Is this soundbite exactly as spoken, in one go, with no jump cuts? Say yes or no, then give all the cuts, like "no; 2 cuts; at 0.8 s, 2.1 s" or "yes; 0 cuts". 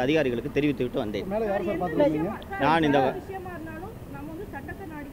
yes; 0 cuts